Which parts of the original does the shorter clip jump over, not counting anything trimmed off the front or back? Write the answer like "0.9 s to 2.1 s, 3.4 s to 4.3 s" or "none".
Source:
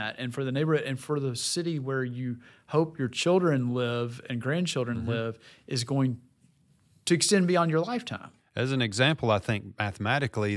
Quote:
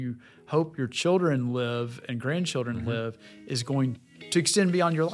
6.3 s to 6.9 s